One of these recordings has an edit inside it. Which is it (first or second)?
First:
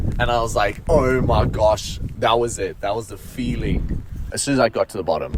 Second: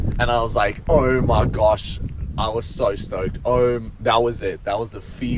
first